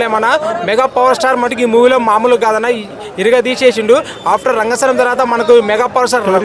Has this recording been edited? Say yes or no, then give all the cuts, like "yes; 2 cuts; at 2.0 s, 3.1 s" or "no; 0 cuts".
no; 0 cuts